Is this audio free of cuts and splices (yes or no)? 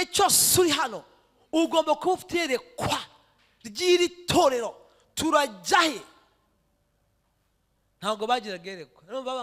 yes